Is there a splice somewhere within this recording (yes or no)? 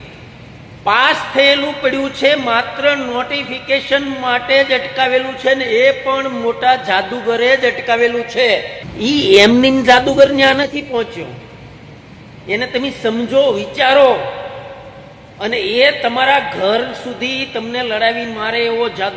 yes